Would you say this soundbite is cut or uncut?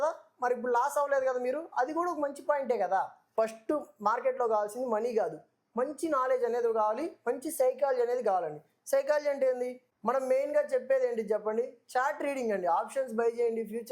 cut